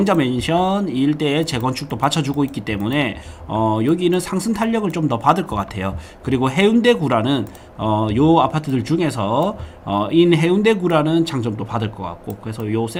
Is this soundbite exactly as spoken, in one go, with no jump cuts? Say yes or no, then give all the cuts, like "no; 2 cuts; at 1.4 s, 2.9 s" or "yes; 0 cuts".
yes; 0 cuts